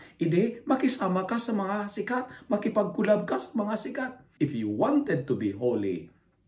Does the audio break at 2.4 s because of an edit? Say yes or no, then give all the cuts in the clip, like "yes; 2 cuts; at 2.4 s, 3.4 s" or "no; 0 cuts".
no; 1 cut; at 4.2 s